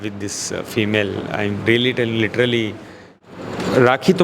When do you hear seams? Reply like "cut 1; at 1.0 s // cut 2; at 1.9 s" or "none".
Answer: cut 1; at 3.1 s